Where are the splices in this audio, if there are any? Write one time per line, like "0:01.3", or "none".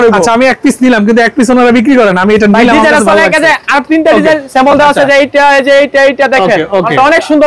none

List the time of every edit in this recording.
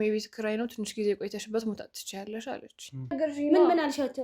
0:03.2

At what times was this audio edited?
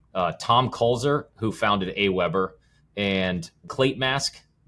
0:03.6

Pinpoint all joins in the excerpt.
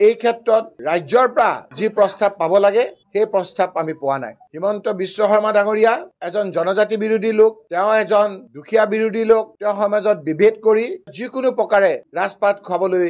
none

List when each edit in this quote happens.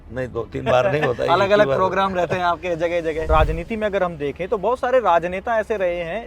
0:03.3

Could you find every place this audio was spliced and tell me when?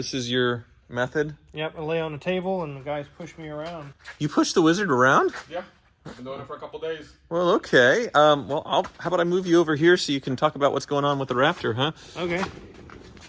none

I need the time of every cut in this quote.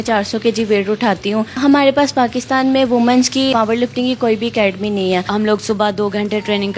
0:01.5
0:03.5
0:05.3

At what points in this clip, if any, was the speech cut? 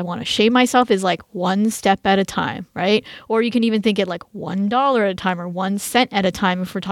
none

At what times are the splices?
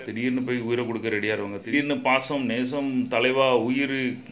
0:01.7

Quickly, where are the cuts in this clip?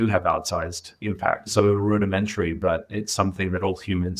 0:01.5

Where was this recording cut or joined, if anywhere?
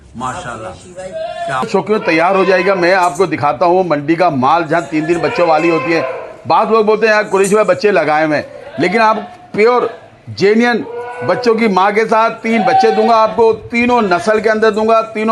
0:01.7

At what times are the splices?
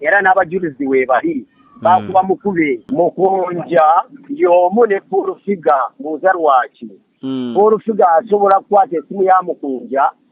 0:02.9

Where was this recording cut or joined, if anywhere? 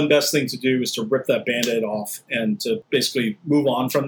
0:02.8

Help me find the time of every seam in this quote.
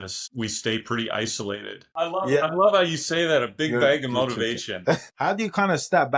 0:01.8
0:05.1

